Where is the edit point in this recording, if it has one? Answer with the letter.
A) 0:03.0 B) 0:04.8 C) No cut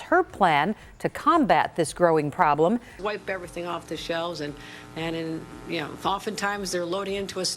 A